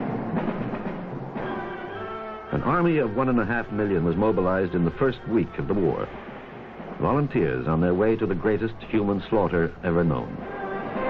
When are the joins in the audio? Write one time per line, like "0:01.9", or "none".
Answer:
none

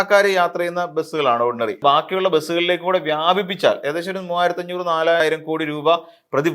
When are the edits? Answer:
0:01.8
0:05.2

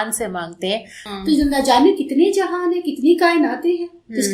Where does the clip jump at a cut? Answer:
0:01.0

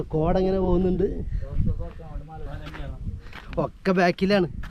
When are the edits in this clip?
0:02.5

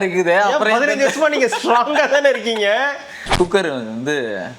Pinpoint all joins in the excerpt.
0:03.2

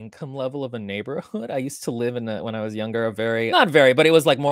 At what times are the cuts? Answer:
0:03.5

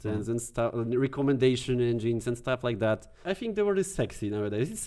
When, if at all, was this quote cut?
0:03.2

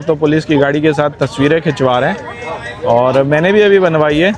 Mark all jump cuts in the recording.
none

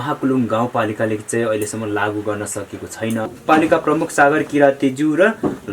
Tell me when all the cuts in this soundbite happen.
0:03.4

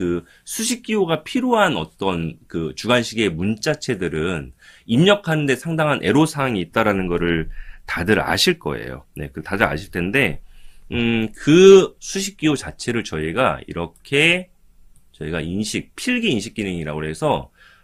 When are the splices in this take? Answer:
none

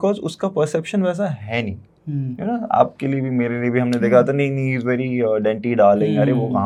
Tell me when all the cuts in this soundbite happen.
none

